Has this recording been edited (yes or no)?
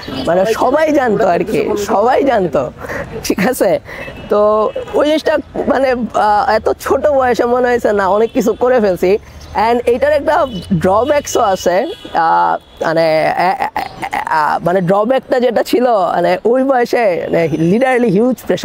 no